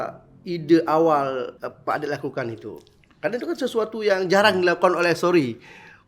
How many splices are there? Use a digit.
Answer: 1